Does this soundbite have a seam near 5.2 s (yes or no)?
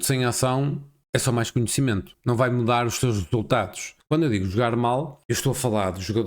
yes